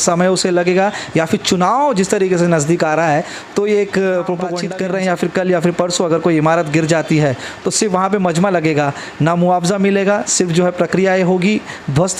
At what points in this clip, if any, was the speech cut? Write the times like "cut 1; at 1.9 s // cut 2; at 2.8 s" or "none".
cut 1; at 4.6 s